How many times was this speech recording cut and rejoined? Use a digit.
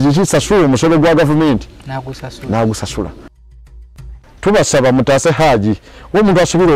1